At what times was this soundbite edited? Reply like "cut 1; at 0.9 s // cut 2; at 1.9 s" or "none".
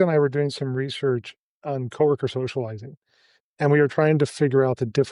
cut 1; at 1.4 s